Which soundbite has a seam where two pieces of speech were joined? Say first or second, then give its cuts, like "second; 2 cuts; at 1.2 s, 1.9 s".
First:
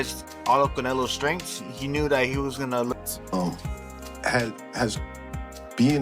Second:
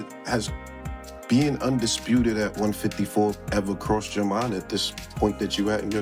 first; 1 cut; at 2.9 s